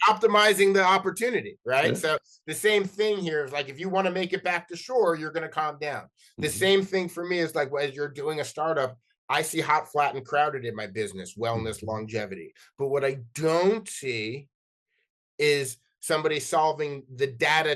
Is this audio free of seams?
yes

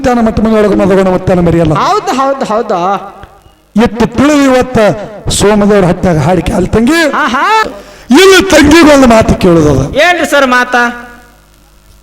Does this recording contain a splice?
yes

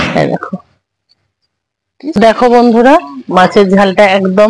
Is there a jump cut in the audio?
yes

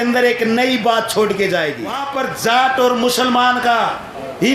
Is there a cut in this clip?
yes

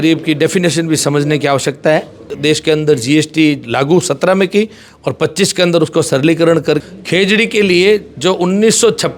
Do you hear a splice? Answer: yes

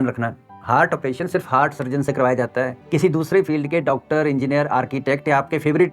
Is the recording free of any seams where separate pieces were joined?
no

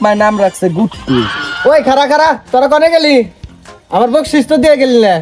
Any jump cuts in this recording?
yes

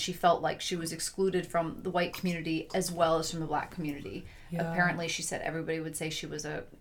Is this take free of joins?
yes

